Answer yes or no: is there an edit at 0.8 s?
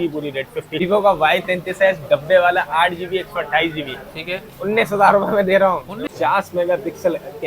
yes